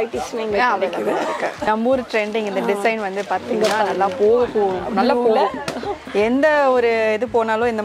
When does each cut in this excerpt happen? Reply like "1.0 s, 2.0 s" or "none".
1.6 s